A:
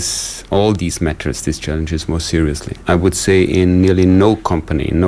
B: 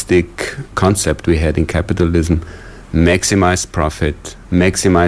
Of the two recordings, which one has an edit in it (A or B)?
A